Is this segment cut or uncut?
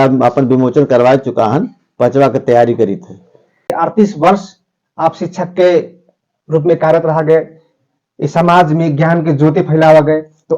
cut